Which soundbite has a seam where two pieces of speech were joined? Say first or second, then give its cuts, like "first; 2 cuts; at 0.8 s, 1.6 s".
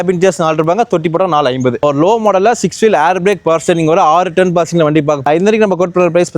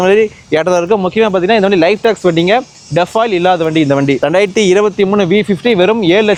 first; 2 cuts; at 1.8 s, 5.2 s